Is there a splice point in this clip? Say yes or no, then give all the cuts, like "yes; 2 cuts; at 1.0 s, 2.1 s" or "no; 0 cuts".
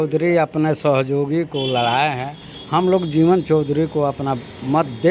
no; 0 cuts